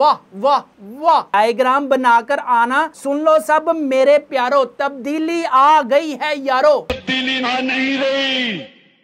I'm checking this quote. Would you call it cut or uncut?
cut